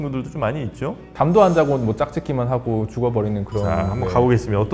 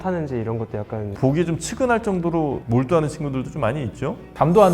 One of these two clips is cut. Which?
second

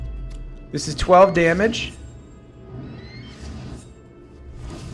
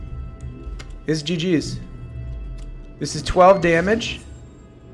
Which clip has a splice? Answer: first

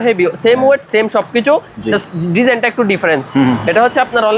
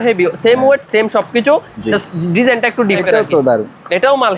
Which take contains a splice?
second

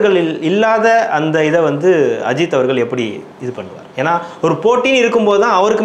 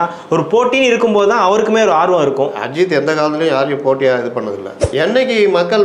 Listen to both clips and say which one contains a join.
second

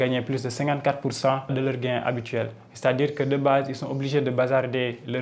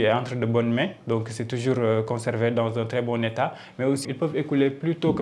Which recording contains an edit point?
first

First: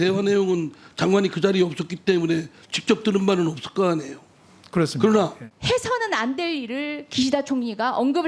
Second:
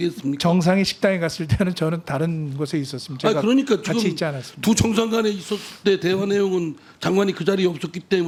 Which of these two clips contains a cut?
first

